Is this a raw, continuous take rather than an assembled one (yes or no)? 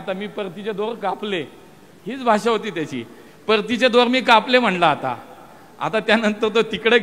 yes